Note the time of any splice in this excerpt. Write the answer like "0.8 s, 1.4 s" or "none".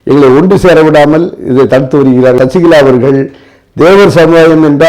2.4 s